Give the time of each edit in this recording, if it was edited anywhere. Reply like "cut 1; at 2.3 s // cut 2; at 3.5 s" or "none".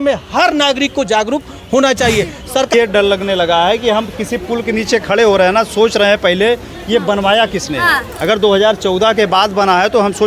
cut 1; at 2.7 s